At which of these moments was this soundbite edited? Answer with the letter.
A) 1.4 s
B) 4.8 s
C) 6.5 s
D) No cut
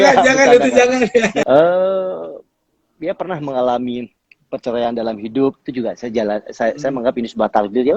A